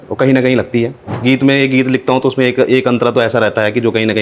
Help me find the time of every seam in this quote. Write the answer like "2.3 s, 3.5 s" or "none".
1.1 s